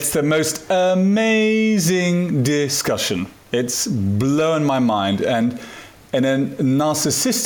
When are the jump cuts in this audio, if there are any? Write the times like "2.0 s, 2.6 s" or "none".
none